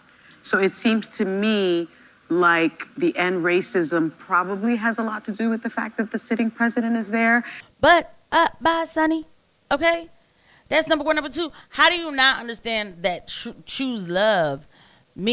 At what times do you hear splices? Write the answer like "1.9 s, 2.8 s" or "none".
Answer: 7.6 s